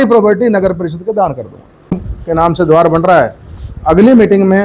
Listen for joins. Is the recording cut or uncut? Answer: cut